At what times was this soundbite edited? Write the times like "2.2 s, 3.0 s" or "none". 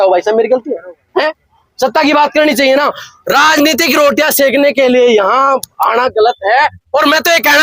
none